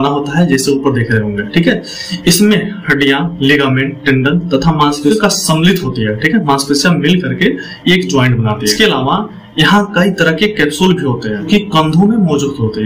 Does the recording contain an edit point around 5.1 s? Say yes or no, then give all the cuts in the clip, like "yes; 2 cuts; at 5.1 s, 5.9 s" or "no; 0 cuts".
yes; 3 cuts; at 5.1 s, 8.7 s, 11.5 s